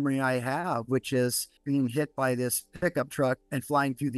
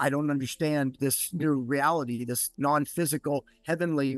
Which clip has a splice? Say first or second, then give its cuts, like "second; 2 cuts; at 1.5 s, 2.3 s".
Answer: second; 1 cut; at 1.0 s